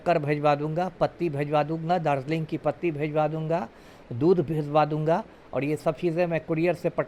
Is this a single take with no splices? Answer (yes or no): yes